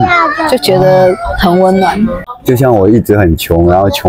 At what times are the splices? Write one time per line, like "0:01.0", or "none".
0:02.2

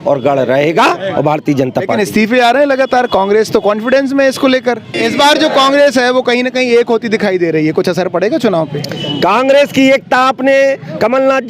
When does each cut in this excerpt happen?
0:05.0

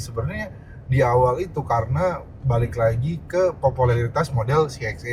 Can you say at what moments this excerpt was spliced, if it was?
none

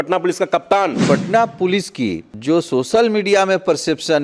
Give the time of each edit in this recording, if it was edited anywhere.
0:01.0
0:02.3

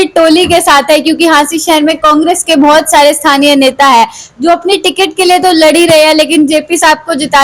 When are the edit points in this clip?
none

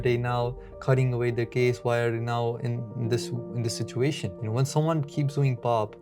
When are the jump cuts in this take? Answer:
0:04.4

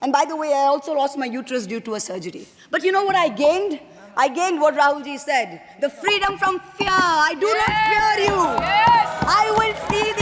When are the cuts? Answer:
none

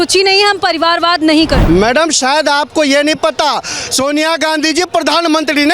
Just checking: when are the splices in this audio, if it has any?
0:01.6

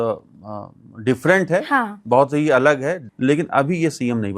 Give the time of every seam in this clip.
0:03.0

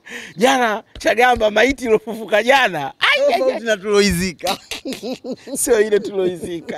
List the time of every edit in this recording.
none

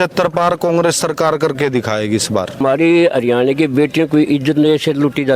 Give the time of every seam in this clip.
0:02.6

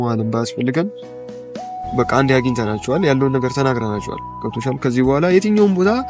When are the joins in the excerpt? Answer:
none

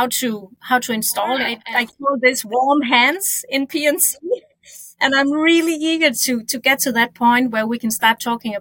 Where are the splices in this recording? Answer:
0:01.7

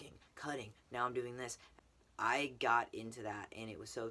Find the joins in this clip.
0:01.7

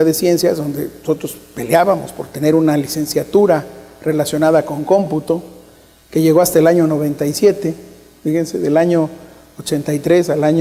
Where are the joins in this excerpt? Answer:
none

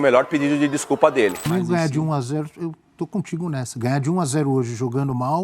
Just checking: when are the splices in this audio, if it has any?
0:01.4

